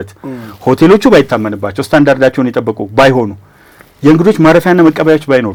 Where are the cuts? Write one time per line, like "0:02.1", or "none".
none

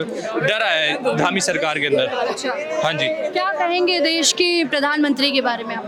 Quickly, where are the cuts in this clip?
none

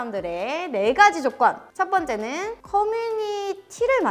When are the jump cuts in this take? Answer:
none

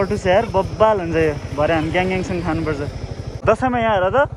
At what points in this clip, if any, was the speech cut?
0:03.2

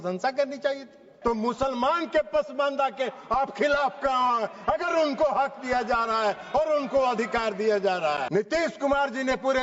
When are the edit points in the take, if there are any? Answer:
0:01.1
0:08.2

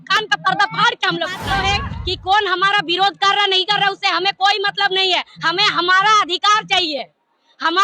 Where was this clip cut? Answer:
0:01.5

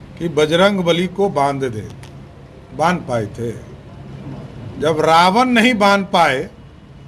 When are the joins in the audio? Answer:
none

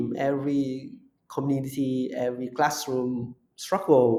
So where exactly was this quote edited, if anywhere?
none

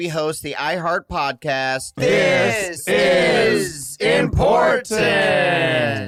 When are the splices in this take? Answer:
none

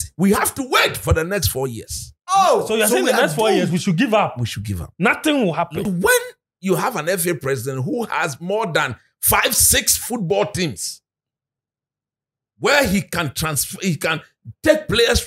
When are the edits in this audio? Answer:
0:05.9

